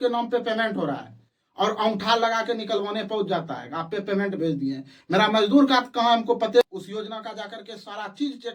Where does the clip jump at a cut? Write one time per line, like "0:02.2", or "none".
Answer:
0:06.6

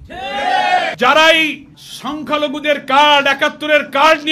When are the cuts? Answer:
0:00.9

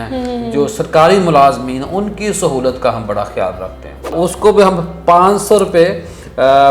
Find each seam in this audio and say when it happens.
0:04.1

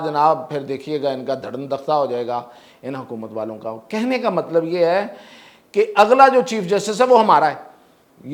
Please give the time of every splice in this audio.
none

